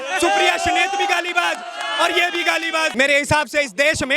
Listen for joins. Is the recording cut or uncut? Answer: cut